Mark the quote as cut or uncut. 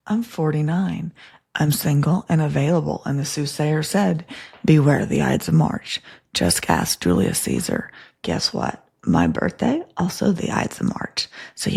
uncut